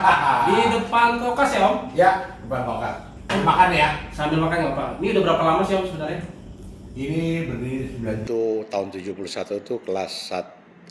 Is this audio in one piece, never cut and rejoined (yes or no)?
no